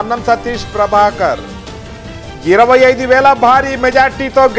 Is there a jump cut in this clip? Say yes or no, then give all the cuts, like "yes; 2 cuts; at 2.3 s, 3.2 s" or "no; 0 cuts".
no; 0 cuts